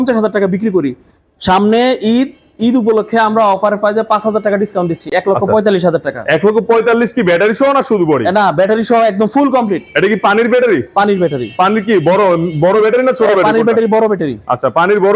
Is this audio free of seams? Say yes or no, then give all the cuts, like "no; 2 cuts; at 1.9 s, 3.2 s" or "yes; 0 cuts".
yes; 0 cuts